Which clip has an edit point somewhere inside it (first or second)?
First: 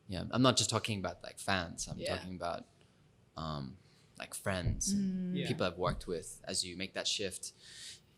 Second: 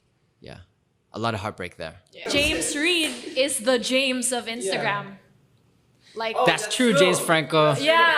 second